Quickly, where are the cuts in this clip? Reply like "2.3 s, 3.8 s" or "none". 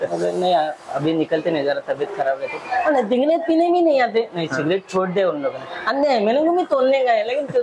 none